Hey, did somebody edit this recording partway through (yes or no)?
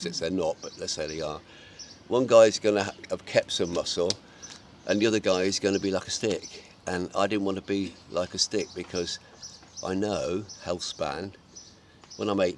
no